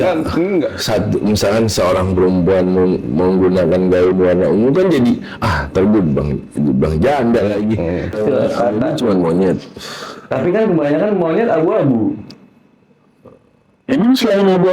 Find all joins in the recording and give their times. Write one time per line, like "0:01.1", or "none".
0:08.2